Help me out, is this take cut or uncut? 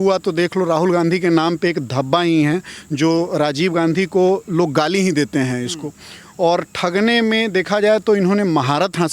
uncut